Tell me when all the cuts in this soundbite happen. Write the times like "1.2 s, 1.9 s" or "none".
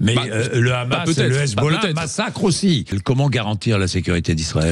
2.9 s